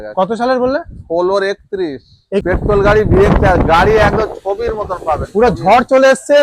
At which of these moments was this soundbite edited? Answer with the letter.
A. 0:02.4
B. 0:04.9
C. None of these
A